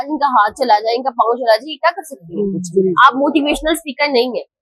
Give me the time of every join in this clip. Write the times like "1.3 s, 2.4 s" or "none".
2.6 s